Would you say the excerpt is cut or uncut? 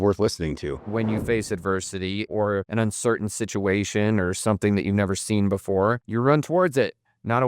cut